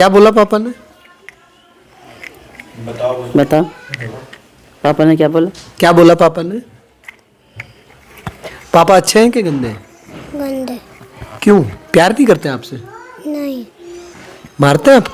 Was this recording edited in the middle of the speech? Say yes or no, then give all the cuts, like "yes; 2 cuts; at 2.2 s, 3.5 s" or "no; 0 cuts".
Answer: no; 0 cuts